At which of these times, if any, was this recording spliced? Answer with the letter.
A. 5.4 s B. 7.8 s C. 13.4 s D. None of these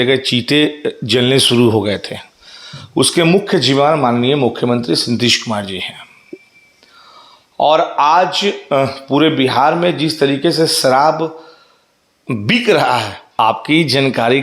C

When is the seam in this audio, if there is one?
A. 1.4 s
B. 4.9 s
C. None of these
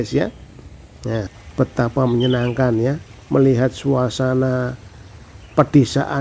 A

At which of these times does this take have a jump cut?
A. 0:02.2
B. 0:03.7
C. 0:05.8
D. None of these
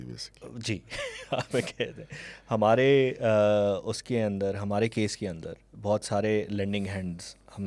D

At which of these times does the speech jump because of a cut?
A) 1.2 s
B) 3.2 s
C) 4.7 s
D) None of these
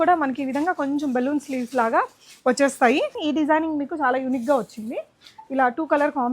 B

